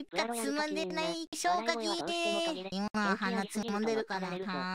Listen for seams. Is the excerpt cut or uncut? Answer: cut